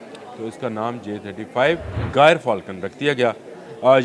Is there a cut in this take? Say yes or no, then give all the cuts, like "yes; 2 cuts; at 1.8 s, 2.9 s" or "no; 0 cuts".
yes; 1 cut; at 1.9 s